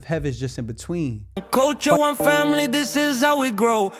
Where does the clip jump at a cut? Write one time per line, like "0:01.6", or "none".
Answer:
0:01.4

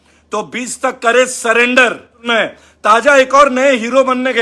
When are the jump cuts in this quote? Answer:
0:02.1

